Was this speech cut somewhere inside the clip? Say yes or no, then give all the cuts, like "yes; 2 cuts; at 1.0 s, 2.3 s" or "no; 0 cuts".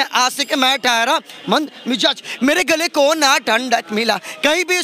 no; 0 cuts